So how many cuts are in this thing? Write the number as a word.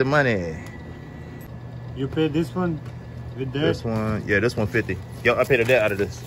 one